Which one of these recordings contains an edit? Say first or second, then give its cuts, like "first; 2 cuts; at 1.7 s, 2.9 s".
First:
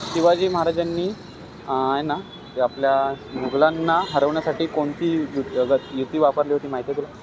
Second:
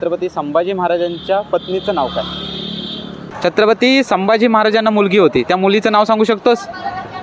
second; 1 cut; at 3.3 s